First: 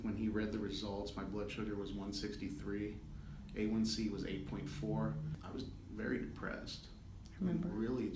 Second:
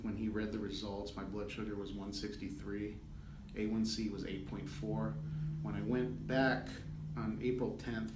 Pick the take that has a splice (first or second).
first